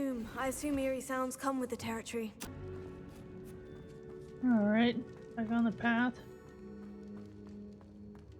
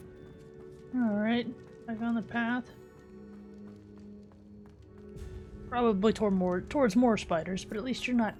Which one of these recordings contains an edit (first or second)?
first